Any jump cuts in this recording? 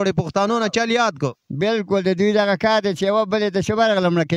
no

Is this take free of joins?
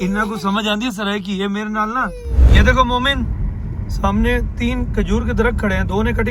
no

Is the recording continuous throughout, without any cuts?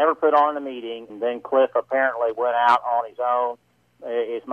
no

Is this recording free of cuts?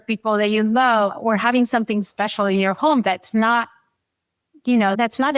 yes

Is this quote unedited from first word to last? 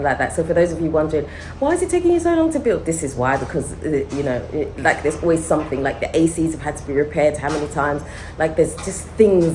yes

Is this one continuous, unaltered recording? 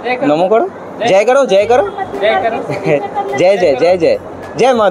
yes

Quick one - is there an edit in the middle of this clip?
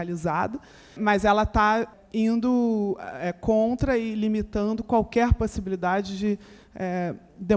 yes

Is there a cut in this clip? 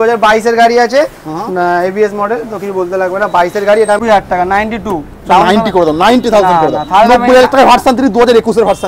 yes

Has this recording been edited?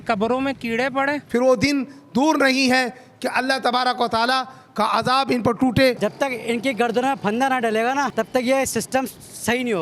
yes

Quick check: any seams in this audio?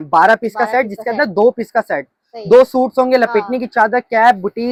no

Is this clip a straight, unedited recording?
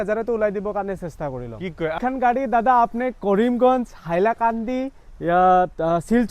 no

